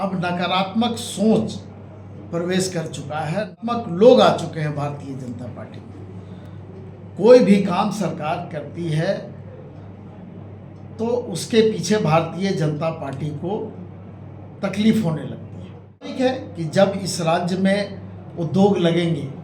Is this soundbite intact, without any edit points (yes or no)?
no